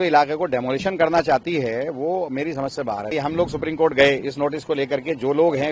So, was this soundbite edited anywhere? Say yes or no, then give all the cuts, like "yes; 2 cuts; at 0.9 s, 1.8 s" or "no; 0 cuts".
yes; 1 cut; at 3.1 s